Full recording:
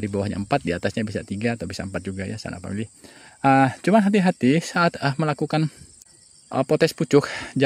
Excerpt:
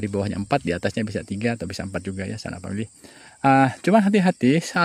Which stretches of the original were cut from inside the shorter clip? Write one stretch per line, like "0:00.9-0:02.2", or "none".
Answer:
none